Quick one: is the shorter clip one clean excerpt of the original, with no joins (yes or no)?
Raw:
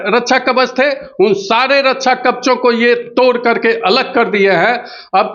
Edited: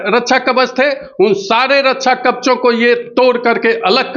yes